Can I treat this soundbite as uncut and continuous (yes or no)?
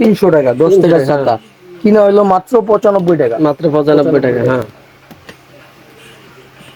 yes